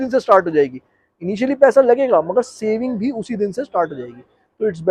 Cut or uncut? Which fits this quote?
uncut